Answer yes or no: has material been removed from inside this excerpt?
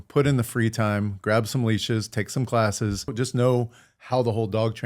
yes